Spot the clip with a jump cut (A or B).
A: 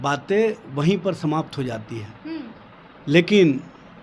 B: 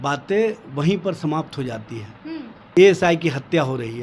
B